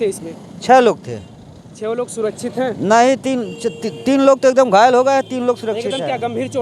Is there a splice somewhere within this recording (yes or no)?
no